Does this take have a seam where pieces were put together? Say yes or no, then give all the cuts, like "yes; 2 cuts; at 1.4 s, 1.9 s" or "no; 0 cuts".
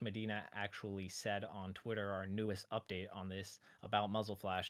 no; 0 cuts